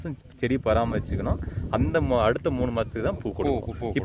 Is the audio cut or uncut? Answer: uncut